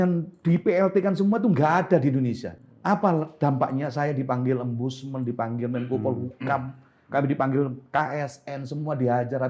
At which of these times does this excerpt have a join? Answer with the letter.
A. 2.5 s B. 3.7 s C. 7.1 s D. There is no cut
A